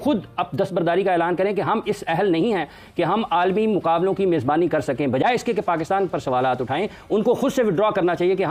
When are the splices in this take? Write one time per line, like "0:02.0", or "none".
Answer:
none